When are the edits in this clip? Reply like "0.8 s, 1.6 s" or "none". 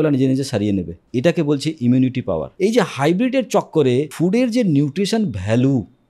1.0 s, 2.5 s, 4.1 s